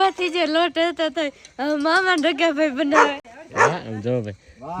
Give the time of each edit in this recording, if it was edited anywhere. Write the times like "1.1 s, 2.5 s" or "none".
none